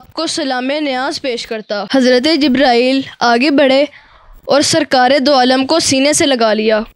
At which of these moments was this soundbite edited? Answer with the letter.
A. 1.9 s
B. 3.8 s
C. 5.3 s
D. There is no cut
A